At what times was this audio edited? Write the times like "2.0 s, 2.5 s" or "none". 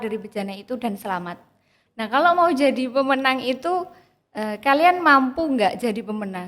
1.8 s